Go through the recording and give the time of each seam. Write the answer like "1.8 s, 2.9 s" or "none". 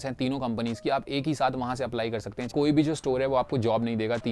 2.5 s